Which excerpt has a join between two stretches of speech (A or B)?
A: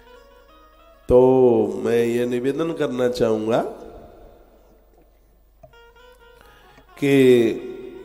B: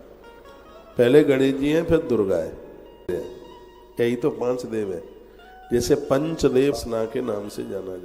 B